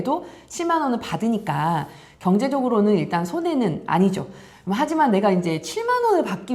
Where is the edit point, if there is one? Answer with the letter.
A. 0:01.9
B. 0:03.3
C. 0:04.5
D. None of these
D